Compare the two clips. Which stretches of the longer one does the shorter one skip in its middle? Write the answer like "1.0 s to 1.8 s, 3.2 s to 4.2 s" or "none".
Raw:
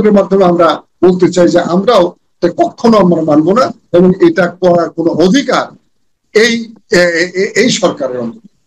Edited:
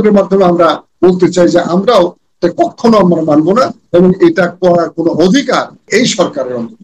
5.9 s to 7.5 s